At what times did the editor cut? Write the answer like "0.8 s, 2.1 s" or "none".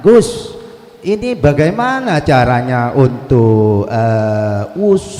none